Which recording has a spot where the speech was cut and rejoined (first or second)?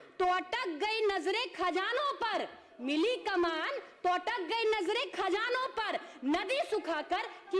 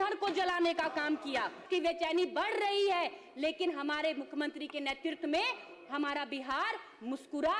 second